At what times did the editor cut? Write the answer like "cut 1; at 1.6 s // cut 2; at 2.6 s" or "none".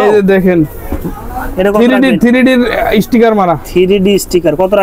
none